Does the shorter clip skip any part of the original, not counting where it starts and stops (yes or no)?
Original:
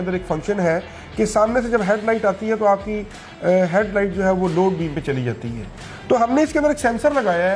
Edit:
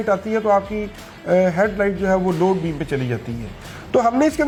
no